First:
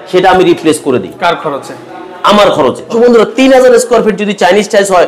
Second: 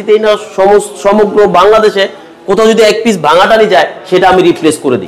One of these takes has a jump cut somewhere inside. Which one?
first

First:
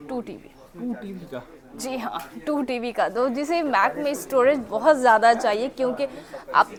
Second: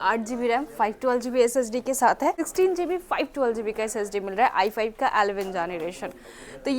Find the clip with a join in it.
second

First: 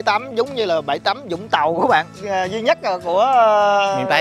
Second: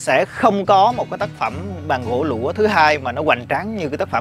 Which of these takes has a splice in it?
first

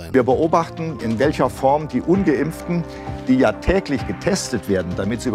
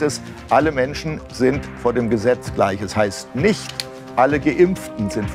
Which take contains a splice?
first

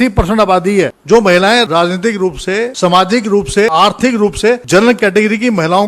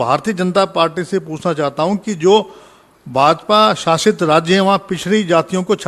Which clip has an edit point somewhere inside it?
first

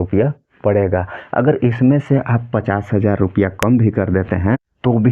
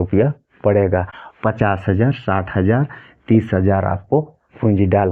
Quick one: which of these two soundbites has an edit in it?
second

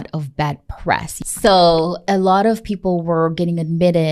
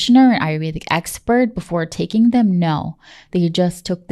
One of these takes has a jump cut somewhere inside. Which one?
first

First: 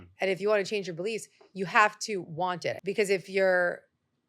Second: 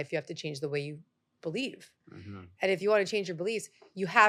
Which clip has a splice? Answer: first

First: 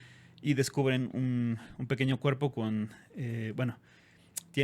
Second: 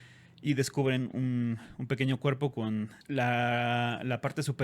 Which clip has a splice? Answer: second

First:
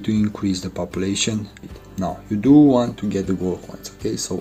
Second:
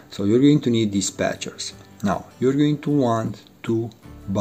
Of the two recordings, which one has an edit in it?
first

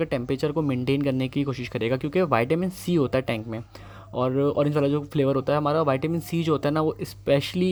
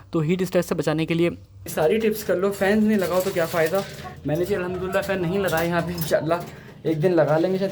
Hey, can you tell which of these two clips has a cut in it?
second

